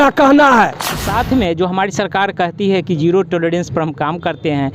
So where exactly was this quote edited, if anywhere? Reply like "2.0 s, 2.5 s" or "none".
1.1 s

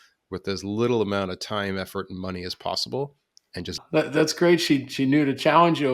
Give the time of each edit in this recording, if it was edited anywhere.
3.8 s

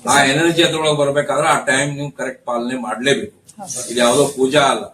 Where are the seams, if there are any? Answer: none

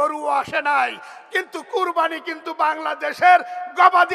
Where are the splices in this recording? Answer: none

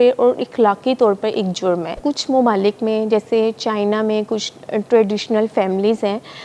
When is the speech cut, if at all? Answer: 1.9 s

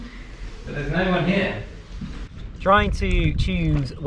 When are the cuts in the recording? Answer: 2.5 s

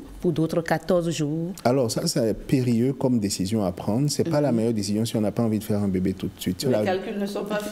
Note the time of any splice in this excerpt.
6.6 s

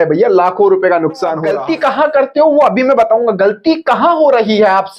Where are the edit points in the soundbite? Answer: 1.4 s

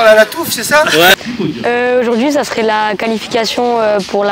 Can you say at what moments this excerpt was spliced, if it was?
1.1 s

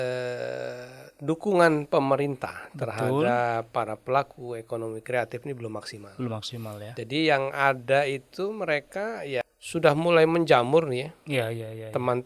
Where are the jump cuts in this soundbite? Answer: 9.4 s

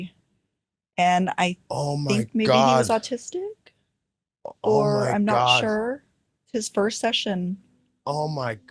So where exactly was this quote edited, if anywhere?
6.4 s

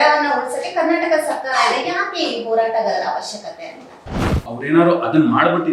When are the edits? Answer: 4.1 s

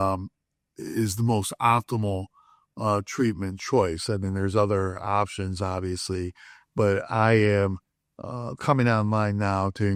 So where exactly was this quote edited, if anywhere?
none

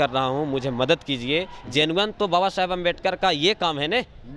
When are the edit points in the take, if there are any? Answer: none

